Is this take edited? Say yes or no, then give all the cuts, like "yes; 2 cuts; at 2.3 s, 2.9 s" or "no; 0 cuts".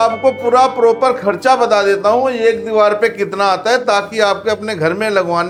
no; 0 cuts